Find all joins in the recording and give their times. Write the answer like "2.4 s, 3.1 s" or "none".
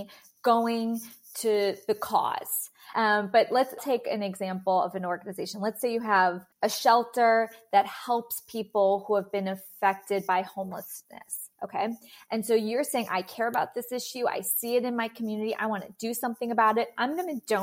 2.9 s, 3.8 s, 6.5 s